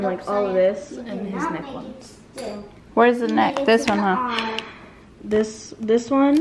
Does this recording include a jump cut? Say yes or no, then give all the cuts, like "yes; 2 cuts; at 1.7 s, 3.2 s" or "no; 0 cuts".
no; 0 cuts